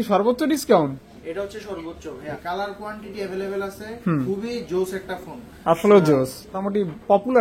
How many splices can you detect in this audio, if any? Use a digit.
2